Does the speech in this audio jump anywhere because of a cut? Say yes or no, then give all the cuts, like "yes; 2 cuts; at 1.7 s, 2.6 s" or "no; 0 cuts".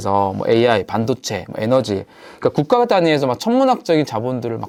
no; 0 cuts